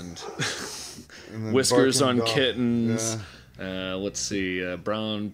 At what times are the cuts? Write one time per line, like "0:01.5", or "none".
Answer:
none